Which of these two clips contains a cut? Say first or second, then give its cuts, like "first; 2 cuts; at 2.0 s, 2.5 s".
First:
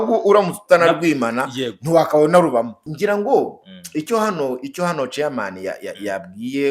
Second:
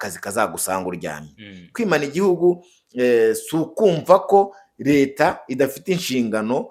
first; 1 cut; at 2.8 s